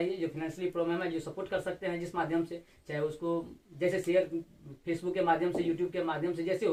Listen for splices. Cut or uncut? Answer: uncut